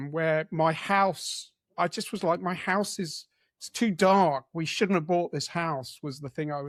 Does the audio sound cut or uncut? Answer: uncut